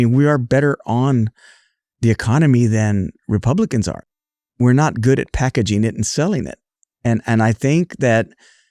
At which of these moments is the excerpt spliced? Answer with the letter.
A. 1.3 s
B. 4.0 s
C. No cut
B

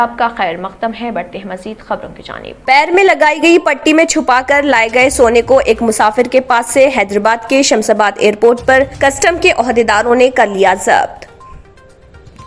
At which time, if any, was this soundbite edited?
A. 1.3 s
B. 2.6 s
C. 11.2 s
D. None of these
B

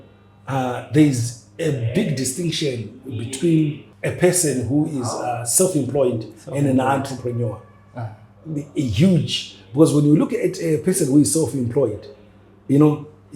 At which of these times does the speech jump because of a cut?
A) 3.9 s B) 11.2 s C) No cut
A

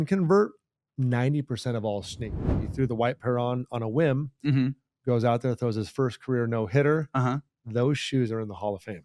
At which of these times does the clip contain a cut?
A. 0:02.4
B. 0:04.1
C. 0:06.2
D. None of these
A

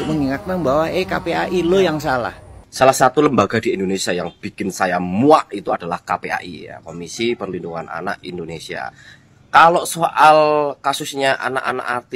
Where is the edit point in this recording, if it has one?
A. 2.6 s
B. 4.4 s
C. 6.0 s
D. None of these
A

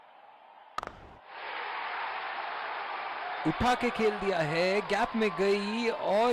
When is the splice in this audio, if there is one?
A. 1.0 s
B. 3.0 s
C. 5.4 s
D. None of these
A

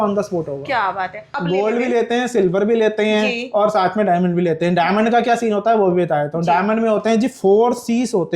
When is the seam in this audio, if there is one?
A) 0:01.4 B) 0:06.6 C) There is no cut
A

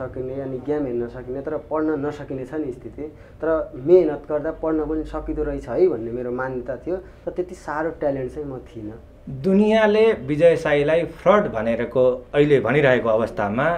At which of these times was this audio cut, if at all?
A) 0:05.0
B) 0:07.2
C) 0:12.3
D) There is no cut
D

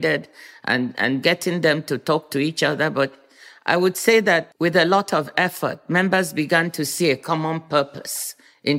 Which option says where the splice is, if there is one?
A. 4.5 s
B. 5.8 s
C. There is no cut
A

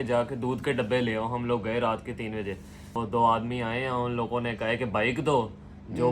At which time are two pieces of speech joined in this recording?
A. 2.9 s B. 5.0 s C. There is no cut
A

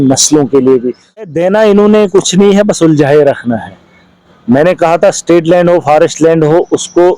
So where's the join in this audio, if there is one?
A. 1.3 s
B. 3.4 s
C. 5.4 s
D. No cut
A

